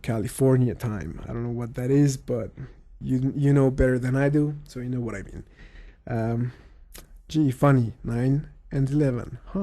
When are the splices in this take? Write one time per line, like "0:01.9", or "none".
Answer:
0:07.3

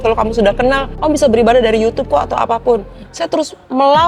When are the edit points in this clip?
0:00.9

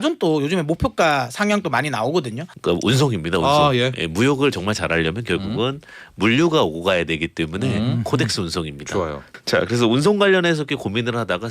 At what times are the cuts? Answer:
0:02.5
0:09.4

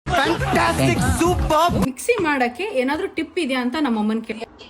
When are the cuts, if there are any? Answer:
0:01.9

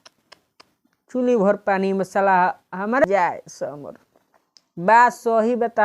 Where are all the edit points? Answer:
0:03.0

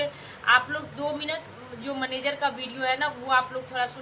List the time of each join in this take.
none

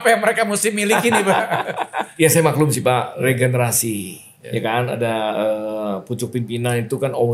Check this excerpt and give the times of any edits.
0:02.0

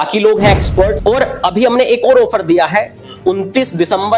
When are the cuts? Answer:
0:01.0

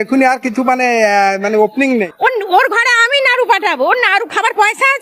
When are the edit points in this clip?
0:02.1

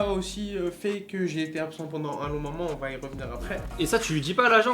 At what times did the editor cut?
0:03.7

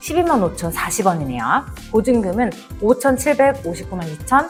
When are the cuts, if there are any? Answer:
none

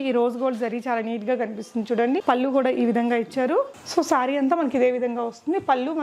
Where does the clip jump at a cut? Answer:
0:03.8

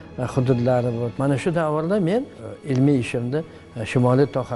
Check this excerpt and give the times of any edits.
0:01.1
0:02.4

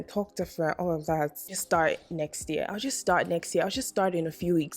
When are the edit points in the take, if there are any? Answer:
0:01.5

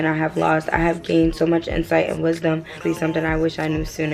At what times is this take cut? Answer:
0:02.8

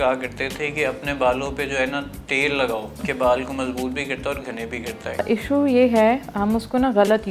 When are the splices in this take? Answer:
0:03.0
0:05.2

